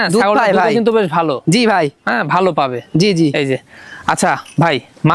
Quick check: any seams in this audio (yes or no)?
no